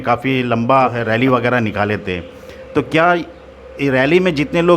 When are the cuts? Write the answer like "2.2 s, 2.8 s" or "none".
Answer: 1.0 s